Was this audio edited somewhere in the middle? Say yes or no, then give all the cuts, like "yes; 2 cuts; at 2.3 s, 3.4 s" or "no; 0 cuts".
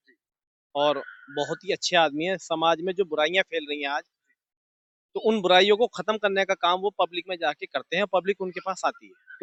no; 0 cuts